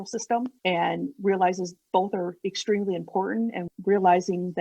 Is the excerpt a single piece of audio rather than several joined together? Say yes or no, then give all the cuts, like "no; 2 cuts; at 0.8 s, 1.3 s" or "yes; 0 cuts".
no; 1 cut; at 3.7 s